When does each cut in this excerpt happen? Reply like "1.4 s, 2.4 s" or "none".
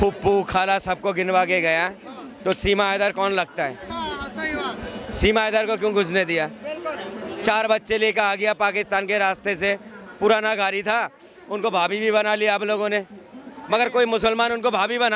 none